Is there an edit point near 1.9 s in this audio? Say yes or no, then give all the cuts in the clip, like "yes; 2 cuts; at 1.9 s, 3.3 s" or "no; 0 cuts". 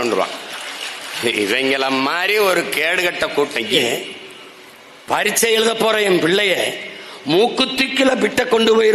no; 1 cut; at 3.7 s